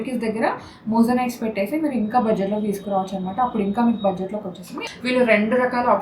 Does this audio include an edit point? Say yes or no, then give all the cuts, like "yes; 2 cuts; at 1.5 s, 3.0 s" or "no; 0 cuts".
yes; 1 cut; at 4.8 s